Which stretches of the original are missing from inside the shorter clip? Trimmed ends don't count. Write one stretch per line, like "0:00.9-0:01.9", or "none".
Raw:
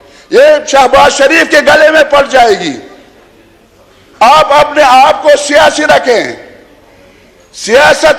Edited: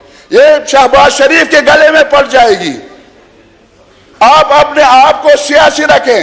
none